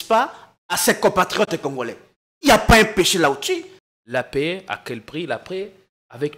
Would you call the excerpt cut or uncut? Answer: cut